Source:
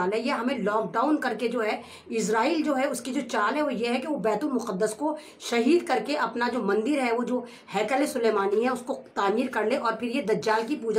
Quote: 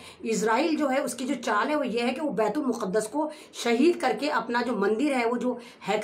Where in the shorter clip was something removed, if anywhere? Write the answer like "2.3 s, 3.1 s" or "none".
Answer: none